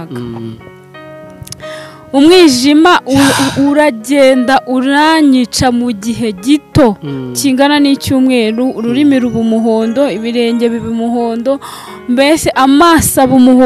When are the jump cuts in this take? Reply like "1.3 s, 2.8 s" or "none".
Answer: none